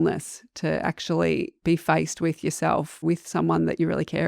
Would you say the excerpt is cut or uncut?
cut